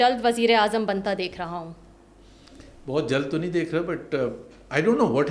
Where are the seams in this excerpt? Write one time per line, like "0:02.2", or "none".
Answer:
none